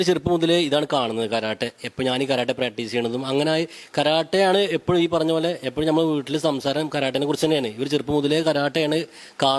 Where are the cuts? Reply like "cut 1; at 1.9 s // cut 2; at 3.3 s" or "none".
none